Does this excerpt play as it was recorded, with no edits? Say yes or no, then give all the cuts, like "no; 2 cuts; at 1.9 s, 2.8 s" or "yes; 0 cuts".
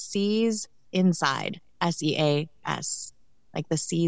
yes; 0 cuts